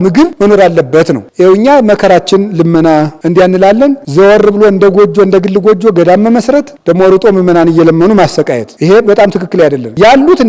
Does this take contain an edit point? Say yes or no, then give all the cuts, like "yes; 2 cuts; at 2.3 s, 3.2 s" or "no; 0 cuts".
no; 0 cuts